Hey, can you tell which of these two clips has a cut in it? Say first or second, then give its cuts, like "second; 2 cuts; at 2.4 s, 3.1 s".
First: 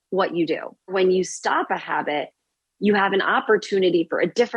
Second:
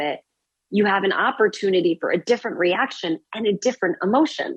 first; 1 cut; at 0.9 s